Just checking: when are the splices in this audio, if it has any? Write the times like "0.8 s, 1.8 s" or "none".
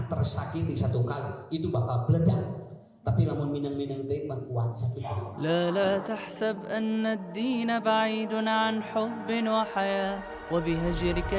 5.4 s